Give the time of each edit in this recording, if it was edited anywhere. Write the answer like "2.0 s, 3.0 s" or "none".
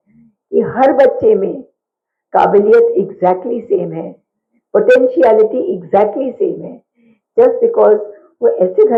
none